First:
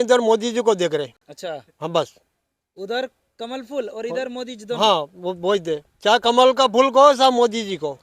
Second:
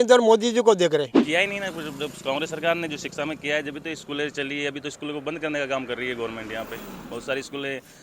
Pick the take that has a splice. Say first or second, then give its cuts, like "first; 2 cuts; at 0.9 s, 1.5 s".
second; 1 cut; at 1.2 s